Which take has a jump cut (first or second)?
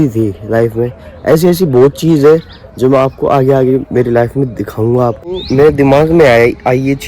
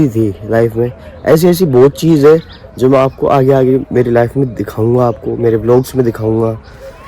first